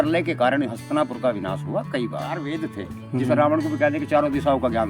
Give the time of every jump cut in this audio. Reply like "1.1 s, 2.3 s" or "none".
2.5 s